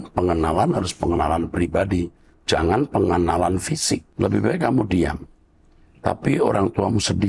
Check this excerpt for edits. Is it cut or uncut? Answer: cut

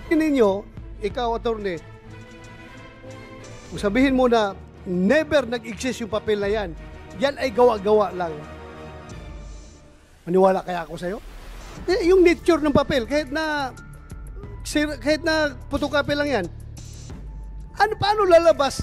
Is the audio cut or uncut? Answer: uncut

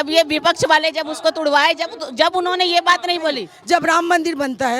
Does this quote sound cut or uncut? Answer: cut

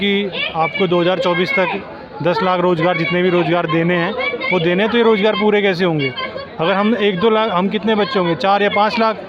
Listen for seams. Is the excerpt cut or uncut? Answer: uncut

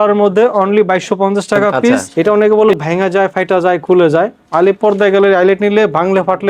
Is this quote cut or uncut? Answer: cut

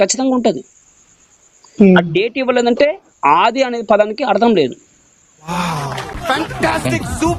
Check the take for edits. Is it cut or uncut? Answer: uncut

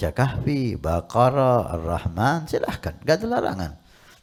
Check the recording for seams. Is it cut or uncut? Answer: uncut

